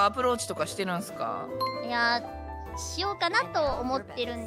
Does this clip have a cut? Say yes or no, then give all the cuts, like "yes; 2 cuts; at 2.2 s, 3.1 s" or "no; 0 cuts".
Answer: no; 0 cuts